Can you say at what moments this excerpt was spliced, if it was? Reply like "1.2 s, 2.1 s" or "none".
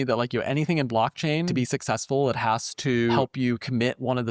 1.5 s, 3.2 s